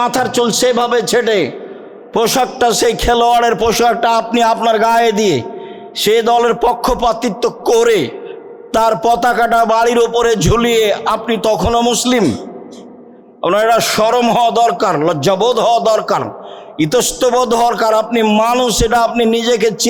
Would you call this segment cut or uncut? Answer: uncut